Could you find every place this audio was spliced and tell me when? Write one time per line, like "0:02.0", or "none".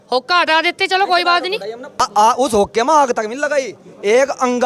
0:02.0